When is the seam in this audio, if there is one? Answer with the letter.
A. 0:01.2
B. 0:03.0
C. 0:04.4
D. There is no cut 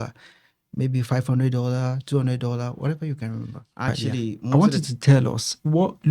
C